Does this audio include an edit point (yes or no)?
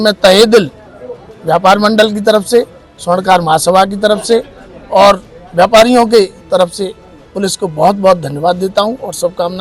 no